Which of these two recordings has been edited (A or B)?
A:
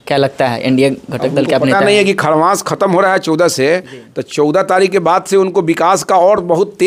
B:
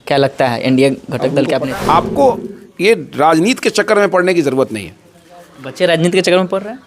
B